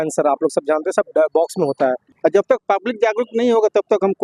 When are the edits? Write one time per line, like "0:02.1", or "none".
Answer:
0:02.1